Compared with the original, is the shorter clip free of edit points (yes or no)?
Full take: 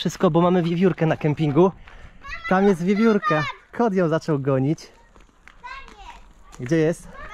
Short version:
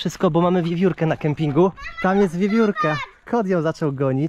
no